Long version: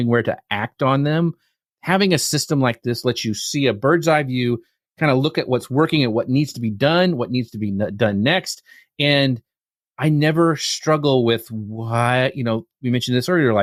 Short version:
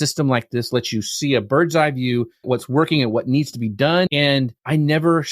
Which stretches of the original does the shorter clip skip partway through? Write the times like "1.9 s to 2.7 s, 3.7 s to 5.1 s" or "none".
4.7 s to 5.4 s, 7.1 s to 9.4 s